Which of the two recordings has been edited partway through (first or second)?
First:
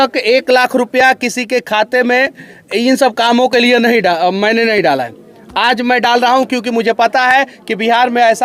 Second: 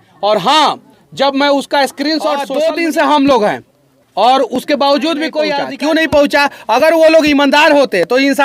second